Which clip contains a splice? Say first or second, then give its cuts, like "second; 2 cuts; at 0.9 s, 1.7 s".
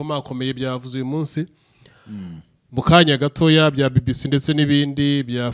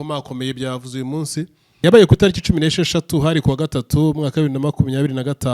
second; 1 cut; at 1.8 s